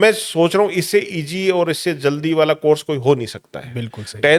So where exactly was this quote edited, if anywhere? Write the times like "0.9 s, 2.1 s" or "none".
none